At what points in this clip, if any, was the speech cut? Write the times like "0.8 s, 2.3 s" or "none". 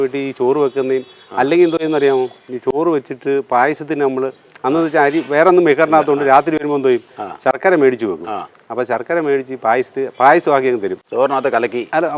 none